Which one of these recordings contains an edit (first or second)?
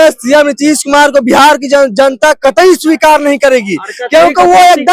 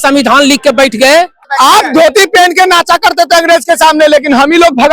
second